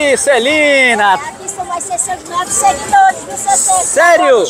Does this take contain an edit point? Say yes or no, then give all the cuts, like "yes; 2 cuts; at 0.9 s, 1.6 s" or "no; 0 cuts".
no; 0 cuts